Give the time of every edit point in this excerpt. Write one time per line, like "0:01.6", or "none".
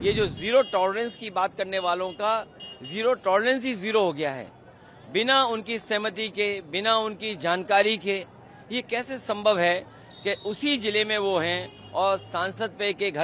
none